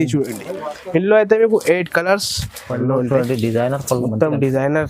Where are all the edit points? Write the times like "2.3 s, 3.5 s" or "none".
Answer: 2.7 s